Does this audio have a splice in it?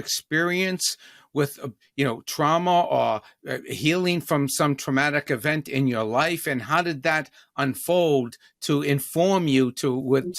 no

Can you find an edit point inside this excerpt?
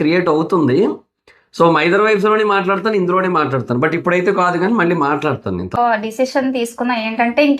yes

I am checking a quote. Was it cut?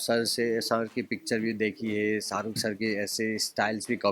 no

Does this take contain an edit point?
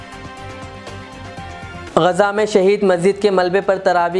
yes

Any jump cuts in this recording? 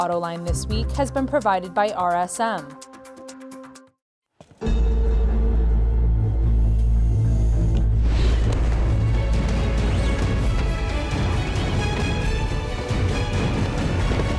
yes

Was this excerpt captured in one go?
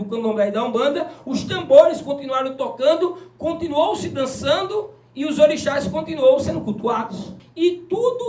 no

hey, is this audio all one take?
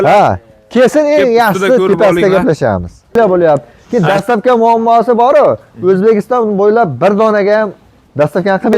no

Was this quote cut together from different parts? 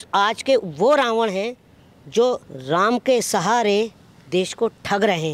yes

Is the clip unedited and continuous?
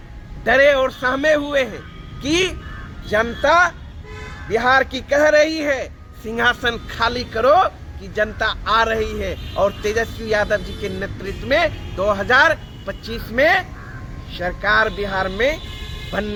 yes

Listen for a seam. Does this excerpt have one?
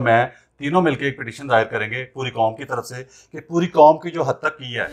no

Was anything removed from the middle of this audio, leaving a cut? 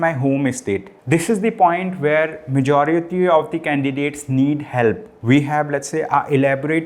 yes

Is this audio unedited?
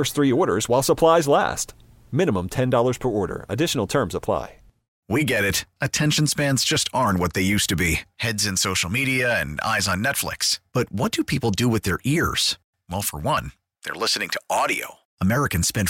no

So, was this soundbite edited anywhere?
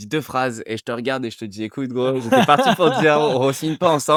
no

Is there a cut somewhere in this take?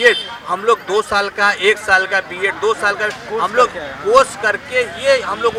no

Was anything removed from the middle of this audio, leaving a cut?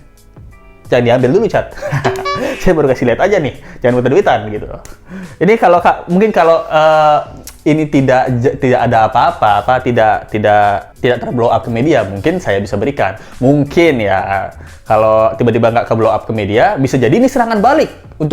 no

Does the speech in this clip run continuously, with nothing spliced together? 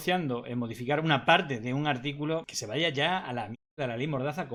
yes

